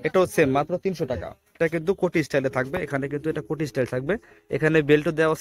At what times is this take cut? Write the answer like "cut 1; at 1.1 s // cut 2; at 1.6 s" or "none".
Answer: cut 1; at 1.6 s